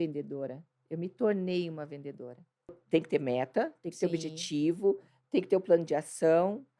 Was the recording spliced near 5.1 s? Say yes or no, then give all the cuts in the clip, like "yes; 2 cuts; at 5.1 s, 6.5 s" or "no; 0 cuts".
no; 1 cut; at 2.8 s